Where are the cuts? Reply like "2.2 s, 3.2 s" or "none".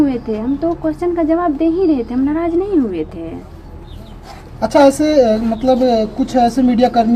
none